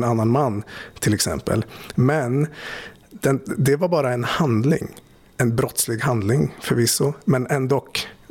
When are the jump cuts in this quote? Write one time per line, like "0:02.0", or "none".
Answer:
none